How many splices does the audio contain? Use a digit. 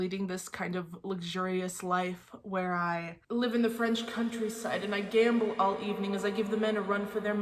0